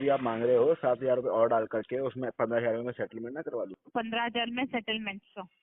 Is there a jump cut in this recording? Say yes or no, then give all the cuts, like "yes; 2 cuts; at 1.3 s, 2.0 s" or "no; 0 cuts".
yes; 1 cut; at 3.8 s